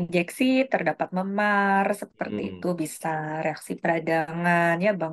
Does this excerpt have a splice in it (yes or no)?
no